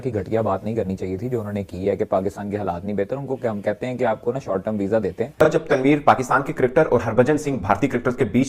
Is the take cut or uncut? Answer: cut